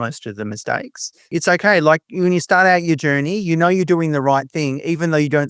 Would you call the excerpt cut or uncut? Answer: cut